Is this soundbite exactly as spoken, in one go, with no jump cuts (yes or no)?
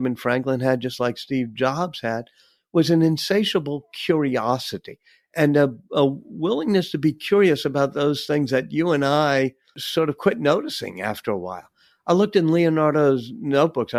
yes